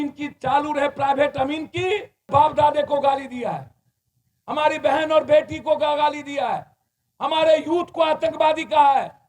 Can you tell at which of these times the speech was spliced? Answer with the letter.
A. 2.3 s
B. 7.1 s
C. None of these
A